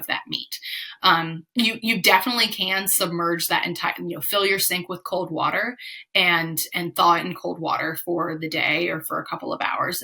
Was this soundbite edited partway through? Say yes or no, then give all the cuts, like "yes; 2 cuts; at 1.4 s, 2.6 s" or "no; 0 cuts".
no; 0 cuts